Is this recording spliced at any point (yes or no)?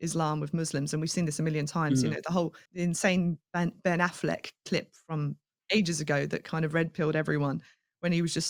yes